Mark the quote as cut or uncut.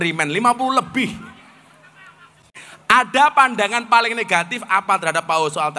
cut